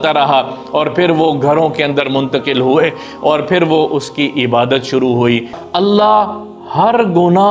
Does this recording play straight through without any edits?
no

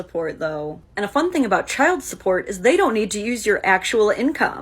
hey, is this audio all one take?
no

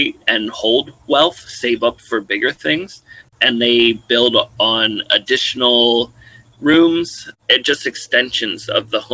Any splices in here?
yes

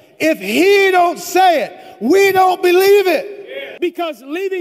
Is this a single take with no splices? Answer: no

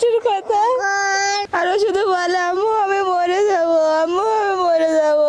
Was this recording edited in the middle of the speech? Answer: yes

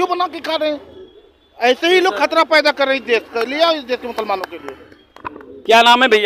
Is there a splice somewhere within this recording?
no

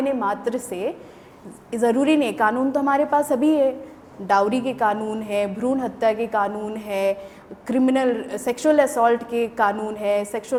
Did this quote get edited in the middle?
no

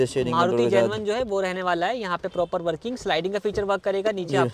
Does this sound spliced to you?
no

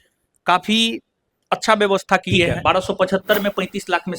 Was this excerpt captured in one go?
no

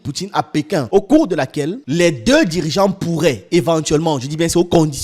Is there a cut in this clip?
yes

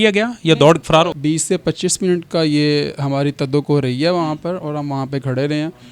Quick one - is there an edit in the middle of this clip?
yes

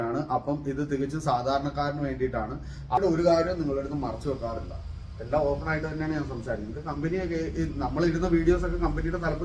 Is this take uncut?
no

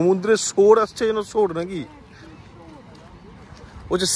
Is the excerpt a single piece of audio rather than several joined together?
yes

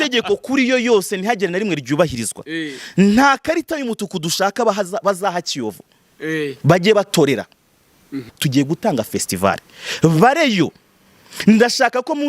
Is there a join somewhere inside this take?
yes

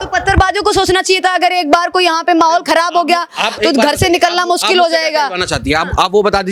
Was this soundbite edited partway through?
no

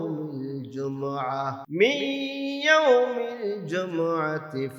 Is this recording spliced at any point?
yes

